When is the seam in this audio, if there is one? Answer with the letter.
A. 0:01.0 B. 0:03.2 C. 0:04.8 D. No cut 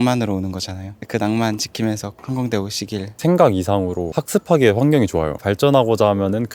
B